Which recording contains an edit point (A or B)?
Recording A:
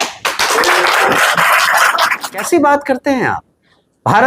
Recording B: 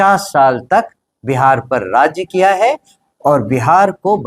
A